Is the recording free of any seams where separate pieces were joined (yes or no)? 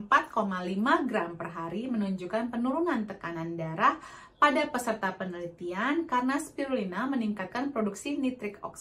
yes